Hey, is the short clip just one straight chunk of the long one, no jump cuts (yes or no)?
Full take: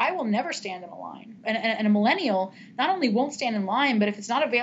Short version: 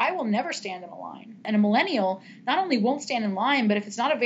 no